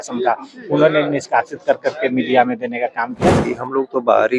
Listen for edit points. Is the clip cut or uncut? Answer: cut